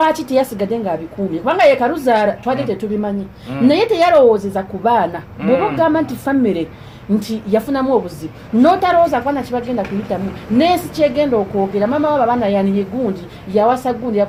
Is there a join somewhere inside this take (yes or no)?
no